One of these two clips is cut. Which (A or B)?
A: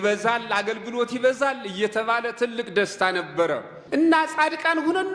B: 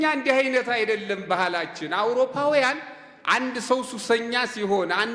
A